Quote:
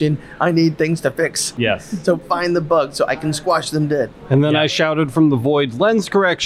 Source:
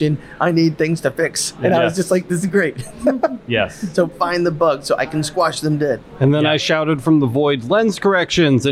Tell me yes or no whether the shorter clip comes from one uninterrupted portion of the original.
no